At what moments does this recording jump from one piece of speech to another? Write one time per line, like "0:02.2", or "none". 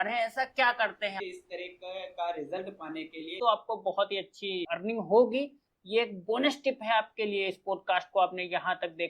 0:01.2
0:03.3
0:04.7

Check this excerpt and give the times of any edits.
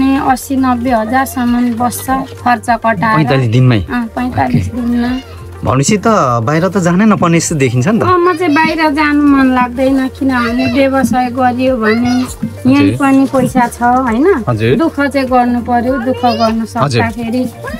none

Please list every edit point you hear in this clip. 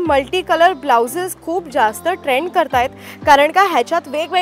none

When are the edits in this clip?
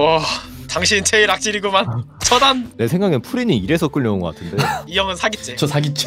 0:02.7
0:04.9

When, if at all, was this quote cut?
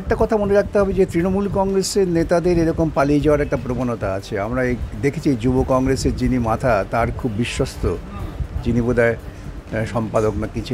none

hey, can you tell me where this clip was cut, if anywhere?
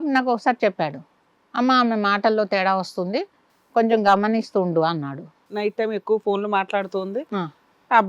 0:05.4

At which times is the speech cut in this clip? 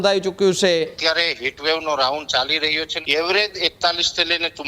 0:01.0
0:02.9

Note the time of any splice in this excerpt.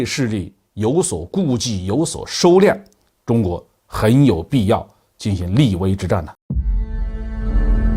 0:06.4

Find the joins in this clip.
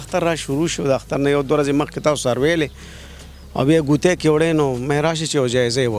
none

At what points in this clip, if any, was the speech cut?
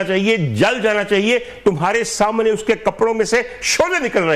none

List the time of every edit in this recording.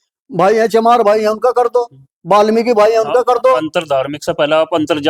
none

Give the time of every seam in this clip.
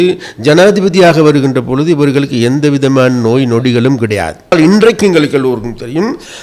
0:04.5

